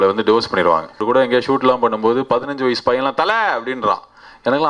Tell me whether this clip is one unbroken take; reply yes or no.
no